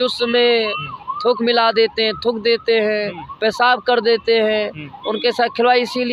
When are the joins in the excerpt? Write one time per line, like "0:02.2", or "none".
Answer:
none